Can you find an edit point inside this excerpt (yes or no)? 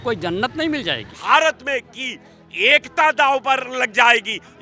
yes